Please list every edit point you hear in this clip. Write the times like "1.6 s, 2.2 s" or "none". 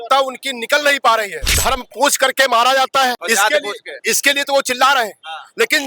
1.4 s, 3.2 s